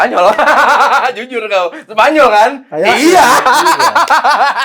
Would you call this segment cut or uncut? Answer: uncut